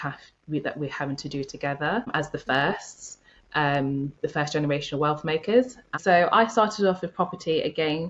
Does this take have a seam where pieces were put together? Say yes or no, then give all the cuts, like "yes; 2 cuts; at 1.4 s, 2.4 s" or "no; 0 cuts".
yes; 1 cut; at 6.0 s